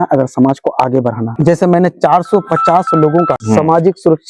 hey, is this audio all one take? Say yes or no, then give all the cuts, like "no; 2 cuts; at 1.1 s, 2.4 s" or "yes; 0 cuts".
no; 2 cuts; at 1.3 s, 3.4 s